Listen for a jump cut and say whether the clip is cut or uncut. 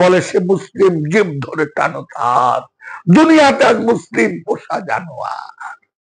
uncut